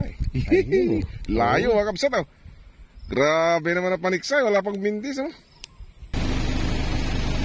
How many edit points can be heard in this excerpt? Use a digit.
1